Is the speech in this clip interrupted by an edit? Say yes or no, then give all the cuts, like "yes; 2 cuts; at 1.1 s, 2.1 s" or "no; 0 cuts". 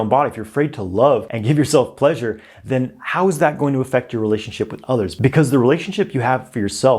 yes; 1 cut; at 1.3 s